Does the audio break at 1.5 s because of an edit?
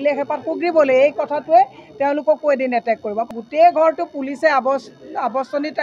no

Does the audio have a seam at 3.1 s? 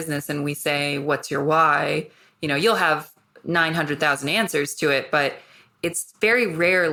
no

